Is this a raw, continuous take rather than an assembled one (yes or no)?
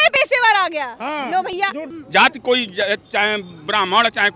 no